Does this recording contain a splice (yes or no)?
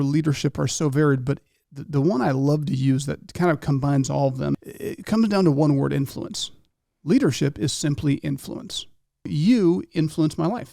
yes